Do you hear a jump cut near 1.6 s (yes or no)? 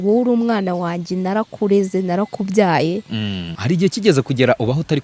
no